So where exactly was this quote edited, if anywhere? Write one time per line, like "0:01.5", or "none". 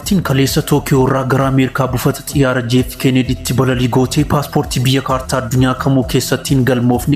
none